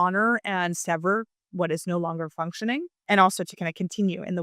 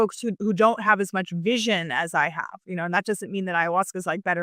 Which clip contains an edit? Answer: first; 2 cuts; at 1.5 s, 3.0 s

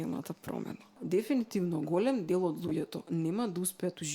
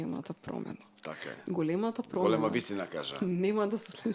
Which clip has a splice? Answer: first; 1 cut; at 1.0 s

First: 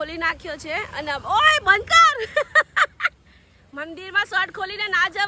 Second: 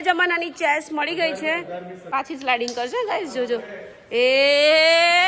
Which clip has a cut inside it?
second; 1 cut; at 2.0 s

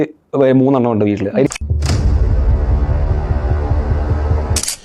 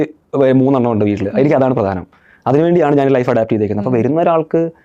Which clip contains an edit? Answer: first; 1 cut; at 1.5 s

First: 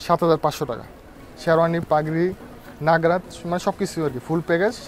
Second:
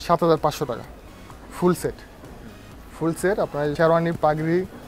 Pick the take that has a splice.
first; 1 cut; at 1.4 s

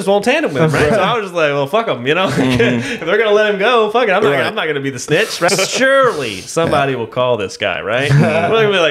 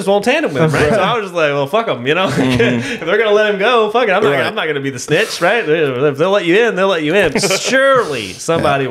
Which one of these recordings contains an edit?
first; 1 cut; at 5.5 s

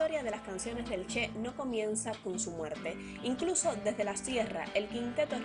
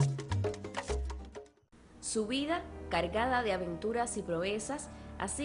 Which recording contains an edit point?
second; 1 cut; at 1.7 s

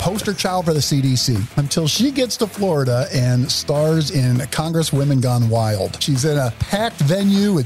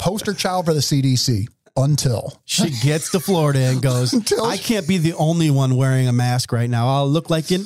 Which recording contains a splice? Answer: first; 2 cuts; at 1.6 s, 6.1 s

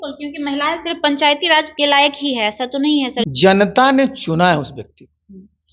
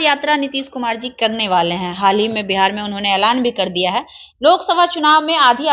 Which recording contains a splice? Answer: first; 2 cuts; at 1.7 s, 3.3 s

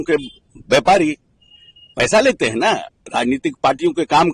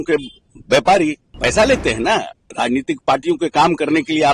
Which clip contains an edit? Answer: second; 1 cut; at 1.3 s

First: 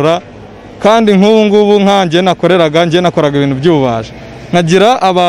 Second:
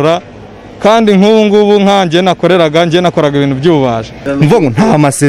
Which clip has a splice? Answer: second; 1 cut; at 4.2 s

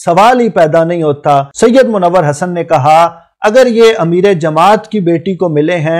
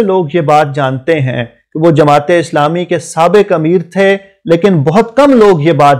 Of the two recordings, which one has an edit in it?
first; 1 cut; at 1.5 s

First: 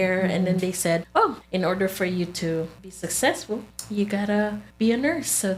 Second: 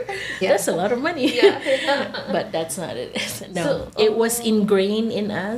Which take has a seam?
first; 4 cuts; at 1.3 s, 2.8 s, 3.8 s, 4.6 s

